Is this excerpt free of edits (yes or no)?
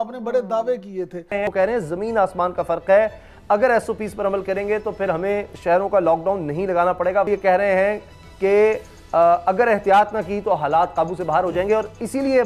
no